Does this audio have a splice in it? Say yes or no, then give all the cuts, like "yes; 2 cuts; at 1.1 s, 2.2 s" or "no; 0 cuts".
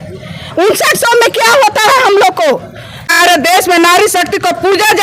yes; 1 cut; at 3.2 s